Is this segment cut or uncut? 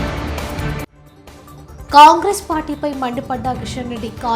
cut